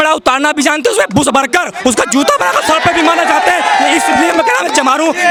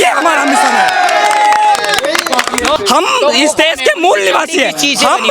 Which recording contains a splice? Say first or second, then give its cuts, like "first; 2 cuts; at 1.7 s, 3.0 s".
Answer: second; 1 cut; at 2.8 s